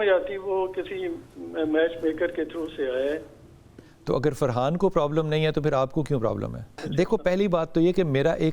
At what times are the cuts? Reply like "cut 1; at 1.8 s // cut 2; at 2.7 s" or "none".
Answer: cut 1; at 3.8 s // cut 2; at 6.8 s